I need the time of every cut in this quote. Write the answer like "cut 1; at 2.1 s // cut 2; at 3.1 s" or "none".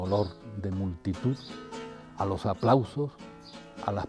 cut 1; at 2.3 s